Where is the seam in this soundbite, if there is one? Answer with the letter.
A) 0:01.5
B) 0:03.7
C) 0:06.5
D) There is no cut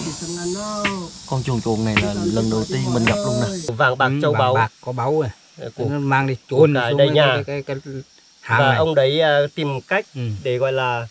B